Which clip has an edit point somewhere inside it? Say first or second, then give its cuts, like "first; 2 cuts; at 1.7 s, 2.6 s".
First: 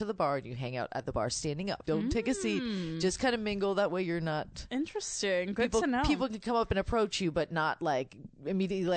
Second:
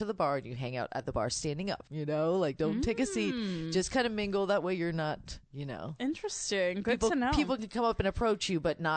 first; 2 cuts; at 1.8 s, 4.6 s